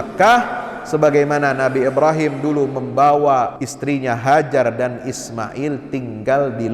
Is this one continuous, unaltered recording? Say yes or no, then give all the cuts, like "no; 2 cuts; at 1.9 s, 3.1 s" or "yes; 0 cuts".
no; 1 cut; at 3.7 s